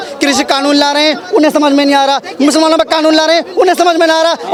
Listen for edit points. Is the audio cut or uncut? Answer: uncut